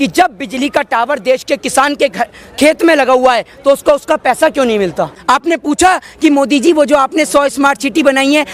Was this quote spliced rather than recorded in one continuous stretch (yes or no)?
yes